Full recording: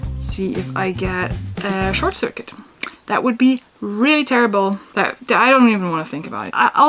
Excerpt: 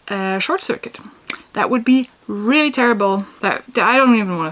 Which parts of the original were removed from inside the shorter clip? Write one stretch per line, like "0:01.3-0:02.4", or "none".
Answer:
none